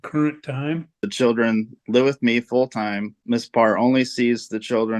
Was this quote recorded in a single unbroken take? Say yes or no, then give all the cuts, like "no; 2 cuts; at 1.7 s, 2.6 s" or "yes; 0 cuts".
no; 2 cuts; at 1.1 s, 3.2 s